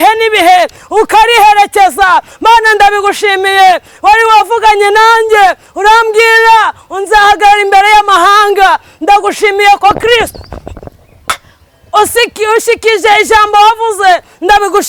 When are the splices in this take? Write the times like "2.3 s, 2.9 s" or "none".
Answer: none